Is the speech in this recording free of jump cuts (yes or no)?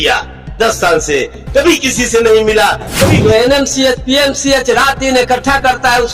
no